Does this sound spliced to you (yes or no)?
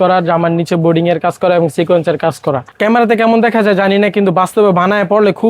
yes